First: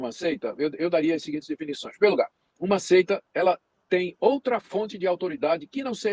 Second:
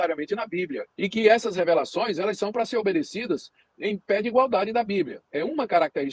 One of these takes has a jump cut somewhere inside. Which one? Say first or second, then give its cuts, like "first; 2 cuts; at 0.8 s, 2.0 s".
second; 2 cuts; at 0.9 s, 5.2 s